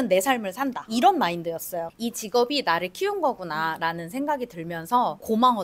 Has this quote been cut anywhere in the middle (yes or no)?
yes